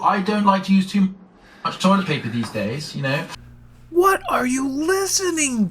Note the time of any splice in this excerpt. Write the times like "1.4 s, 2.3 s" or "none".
3.4 s